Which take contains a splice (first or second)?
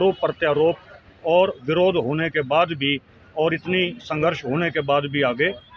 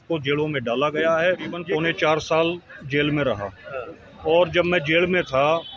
second